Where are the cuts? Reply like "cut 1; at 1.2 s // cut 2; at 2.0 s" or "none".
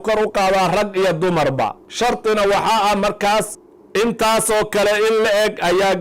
cut 1; at 1.8 s // cut 2; at 3.5 s